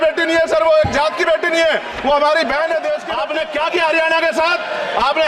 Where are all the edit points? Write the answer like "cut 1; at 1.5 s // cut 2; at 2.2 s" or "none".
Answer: cut 1; at 3.1 s